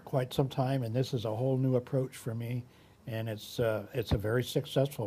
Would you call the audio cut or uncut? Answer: uncut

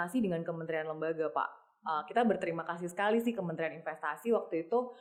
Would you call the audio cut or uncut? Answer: uncut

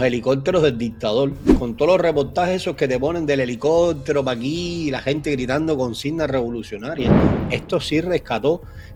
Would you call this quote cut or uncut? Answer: uncut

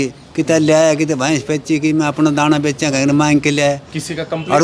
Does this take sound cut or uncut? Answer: uncut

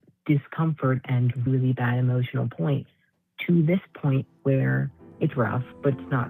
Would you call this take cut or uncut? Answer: cut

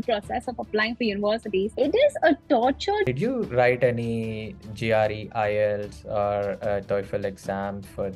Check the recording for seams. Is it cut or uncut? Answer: cut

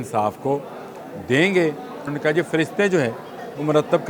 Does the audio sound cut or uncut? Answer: cut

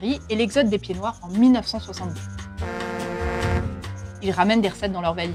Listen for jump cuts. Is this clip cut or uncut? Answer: uncut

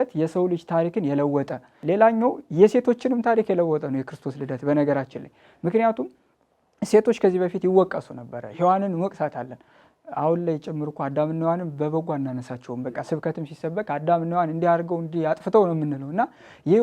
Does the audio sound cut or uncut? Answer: cut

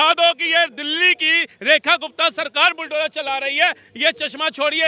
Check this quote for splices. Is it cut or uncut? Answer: uncut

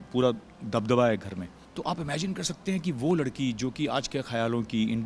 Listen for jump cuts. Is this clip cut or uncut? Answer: cut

